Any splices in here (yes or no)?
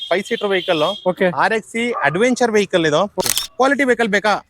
yes